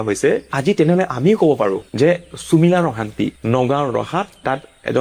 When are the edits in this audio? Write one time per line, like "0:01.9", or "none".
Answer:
none